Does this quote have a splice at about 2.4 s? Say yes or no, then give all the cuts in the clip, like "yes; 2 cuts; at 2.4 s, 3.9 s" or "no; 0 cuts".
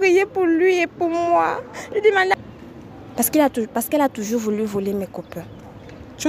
yes; 1 cut; at 2.4 s